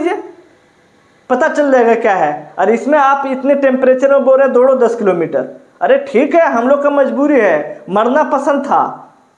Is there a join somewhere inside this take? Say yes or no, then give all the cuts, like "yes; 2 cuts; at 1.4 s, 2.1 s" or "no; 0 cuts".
no; 0 cuts